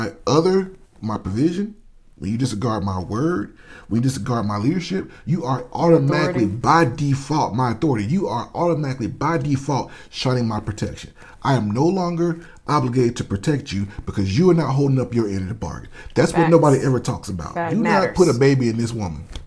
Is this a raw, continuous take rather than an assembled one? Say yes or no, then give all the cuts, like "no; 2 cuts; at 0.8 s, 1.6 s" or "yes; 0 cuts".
no; 1 cut; at 17.7 s